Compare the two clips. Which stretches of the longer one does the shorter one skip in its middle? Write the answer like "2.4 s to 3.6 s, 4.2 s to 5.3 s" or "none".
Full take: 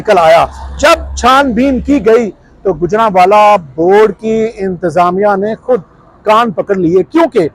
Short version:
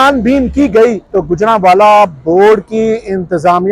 2.3 s to 2.5 s